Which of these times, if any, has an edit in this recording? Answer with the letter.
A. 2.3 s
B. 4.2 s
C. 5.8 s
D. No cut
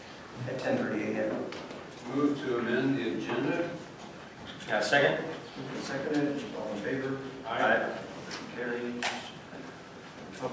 A